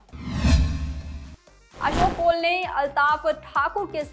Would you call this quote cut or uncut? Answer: uncut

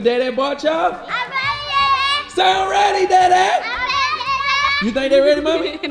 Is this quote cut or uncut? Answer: uncut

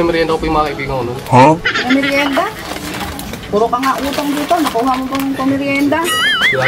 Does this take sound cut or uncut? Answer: uncut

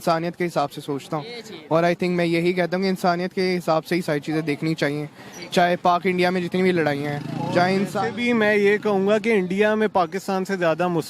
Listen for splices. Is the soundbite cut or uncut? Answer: uncut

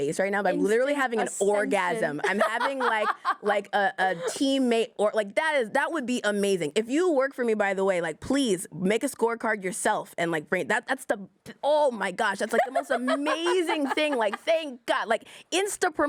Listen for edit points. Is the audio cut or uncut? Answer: uncut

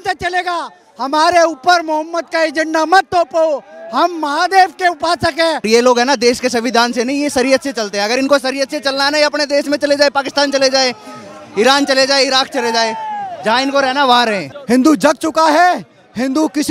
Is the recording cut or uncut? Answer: cut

